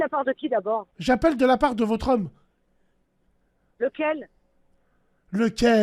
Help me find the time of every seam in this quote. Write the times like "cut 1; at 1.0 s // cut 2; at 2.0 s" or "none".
cut 1; at 0.9 s